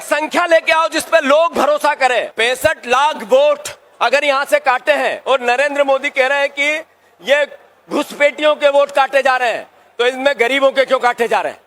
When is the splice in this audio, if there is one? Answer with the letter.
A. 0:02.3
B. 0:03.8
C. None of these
A